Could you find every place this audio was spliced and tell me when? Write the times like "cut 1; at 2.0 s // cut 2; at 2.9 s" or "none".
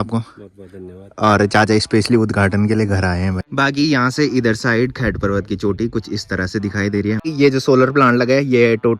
cut 1; at 3.5 s // cut 2; at 7.3 s